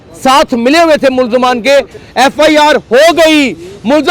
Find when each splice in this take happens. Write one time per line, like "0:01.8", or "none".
0:02.0

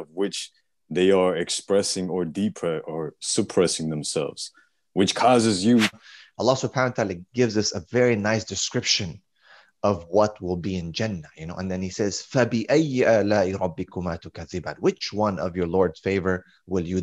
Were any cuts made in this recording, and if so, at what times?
0:06.0

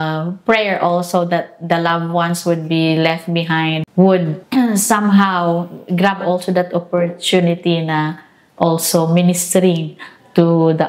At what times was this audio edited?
0:03.8
0:04.4

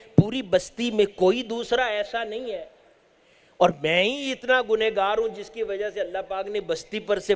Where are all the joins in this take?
none

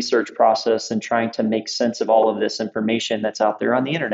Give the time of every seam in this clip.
none

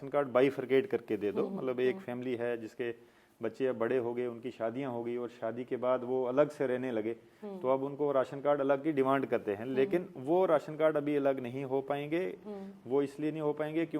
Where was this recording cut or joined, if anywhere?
none

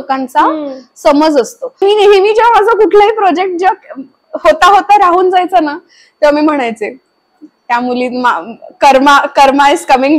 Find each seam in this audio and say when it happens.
0:01.8

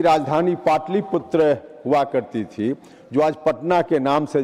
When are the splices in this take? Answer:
none

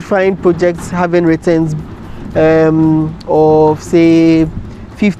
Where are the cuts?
none

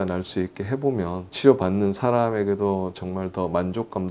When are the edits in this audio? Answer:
none

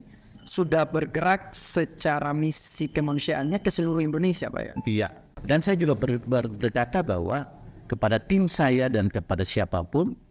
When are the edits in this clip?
0:05.2

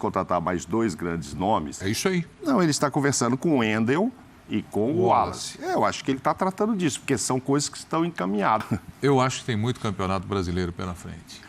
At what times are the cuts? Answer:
0:08.6

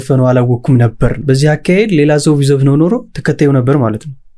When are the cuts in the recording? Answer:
none

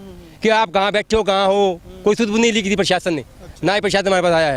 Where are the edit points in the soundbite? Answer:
none

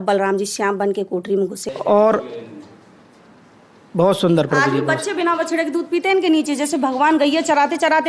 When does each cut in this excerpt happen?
0:01.6

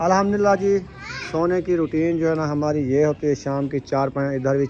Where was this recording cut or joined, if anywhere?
none

